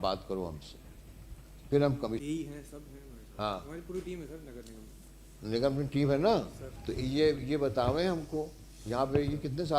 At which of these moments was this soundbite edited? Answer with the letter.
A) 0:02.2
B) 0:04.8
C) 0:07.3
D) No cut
A